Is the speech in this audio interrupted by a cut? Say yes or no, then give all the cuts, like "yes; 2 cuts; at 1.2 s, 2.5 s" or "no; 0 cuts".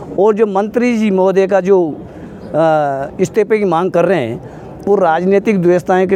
no; 0 cuts